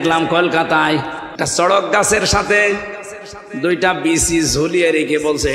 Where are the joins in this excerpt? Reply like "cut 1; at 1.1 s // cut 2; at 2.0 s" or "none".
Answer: cut 1; at 1.2 s